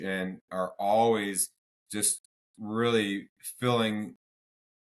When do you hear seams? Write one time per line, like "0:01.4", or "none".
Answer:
none